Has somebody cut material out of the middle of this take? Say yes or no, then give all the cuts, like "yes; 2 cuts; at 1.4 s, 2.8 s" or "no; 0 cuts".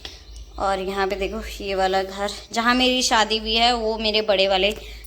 no; 0 cuts